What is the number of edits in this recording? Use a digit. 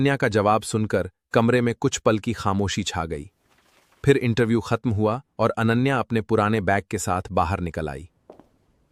0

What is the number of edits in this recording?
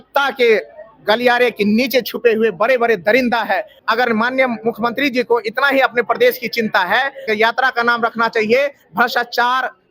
2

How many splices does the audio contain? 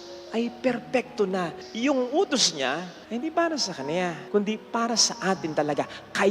3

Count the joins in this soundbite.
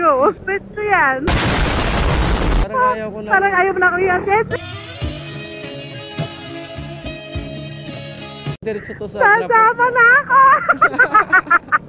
0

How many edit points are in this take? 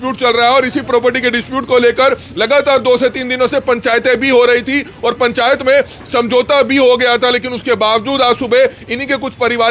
0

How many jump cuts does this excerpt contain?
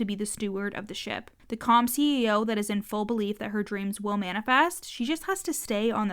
1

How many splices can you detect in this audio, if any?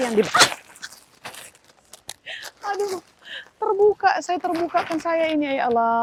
0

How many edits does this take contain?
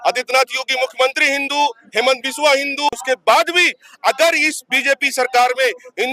1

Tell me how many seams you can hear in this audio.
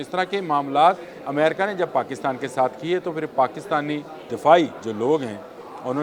3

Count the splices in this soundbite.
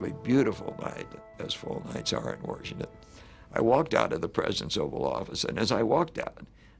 1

